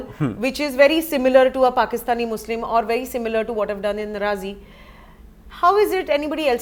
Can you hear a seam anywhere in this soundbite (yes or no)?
no